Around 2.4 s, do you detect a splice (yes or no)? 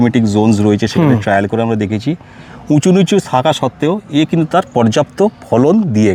no